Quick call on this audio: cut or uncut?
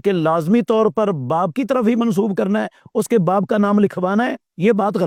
uncut